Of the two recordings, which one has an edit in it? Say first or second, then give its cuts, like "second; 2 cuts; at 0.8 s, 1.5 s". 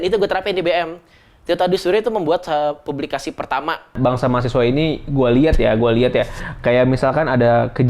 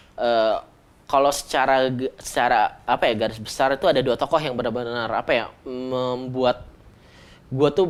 first; 1 cut; at 3.9 s